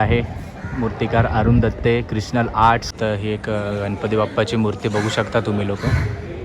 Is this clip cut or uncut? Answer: cut